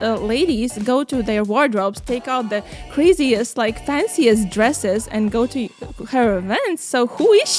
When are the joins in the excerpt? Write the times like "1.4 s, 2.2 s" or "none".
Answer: none

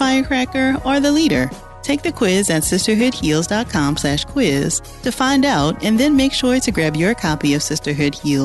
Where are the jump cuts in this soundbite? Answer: none

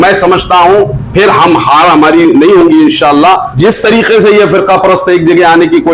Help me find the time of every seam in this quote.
3.5 s

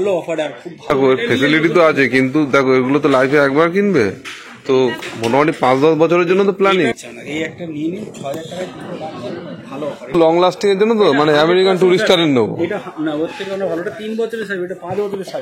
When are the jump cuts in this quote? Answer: 0.9 s, 7.0 s, 10.1 s

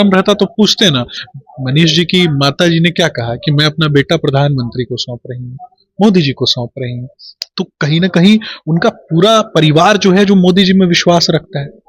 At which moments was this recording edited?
1.2 s

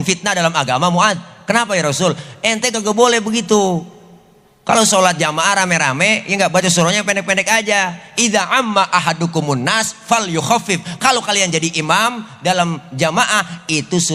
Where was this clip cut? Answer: none

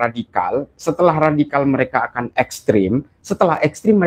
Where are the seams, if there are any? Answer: none

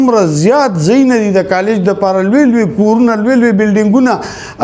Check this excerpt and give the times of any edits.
none

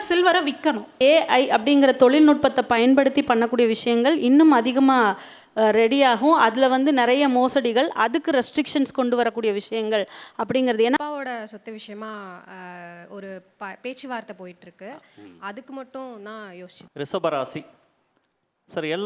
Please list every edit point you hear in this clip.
1.0 s, 11.0 s, 16.8 s

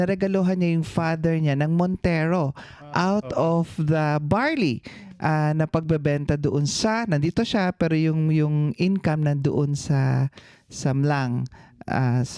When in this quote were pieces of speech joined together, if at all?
none

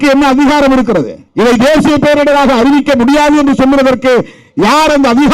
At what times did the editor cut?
1.2 s

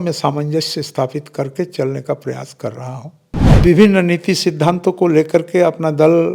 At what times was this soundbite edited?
3.6 s

